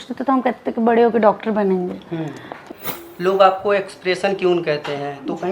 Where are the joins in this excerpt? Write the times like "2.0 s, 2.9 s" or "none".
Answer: 2.6 s